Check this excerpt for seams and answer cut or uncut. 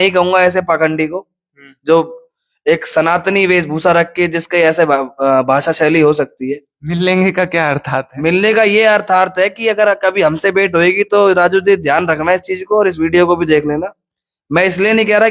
uncut